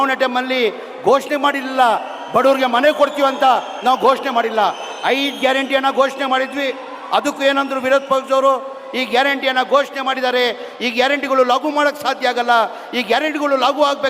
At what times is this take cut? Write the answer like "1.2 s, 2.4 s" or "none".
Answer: none